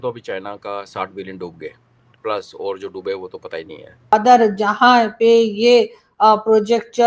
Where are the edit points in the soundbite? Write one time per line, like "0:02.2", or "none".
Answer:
0:04.1

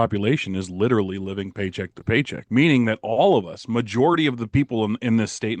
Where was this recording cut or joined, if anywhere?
0:02.4

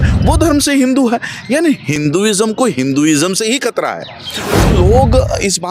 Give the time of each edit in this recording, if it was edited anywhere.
0:02.0
0:04.6

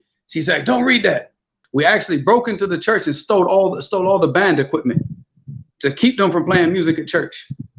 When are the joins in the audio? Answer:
0:01.6

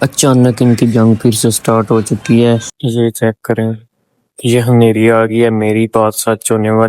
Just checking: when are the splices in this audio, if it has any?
0:02.7

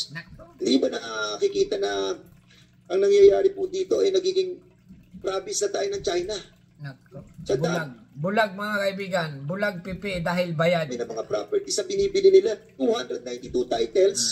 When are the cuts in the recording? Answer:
none

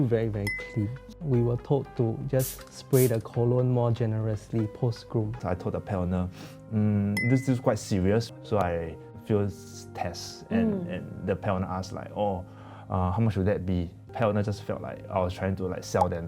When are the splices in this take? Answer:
0:05.4
0:08.3
0:14.1

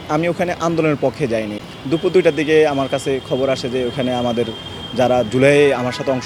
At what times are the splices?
0:01.6

